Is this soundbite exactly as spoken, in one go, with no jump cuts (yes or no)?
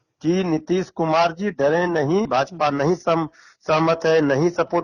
no